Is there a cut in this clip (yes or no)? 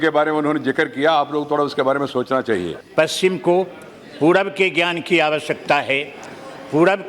yes